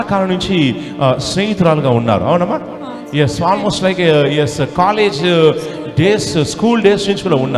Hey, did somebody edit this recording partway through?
no; 0 cuts

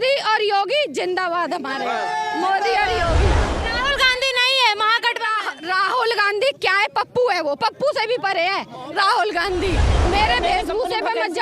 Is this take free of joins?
no; 2 cuts; at 3.5 s, 10.0 s

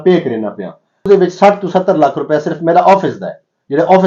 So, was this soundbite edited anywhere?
yes; 1 cut; at 1.1 s

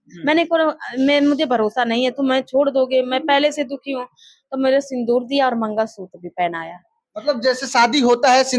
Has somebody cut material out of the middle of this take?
no; 0 cuts

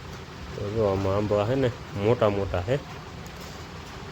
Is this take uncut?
yes; 0 cuts

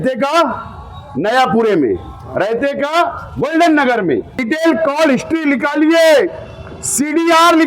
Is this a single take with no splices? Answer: no; 1 cut; at 4.4 s

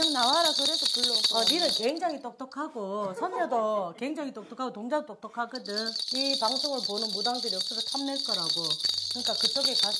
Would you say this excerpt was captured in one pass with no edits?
no; 1 cut; at 6.0 s

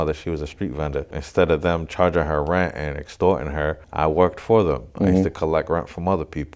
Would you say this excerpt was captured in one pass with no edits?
no; 2 cuts; at 1.2 s, 3.8 s

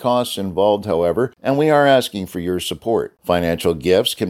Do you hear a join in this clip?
yes; 1 cut; at 1.4 s

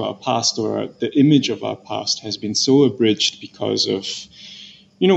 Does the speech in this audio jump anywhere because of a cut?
no; 0 cuts

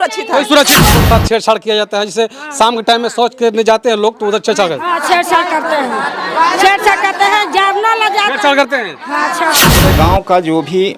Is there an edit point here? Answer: yes; 2 cuts; at 0.9 s, 9.8 s

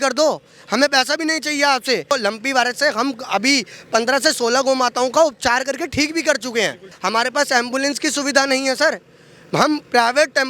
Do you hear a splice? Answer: yes; 2 cuts; at 2.1 s, 6.9 s

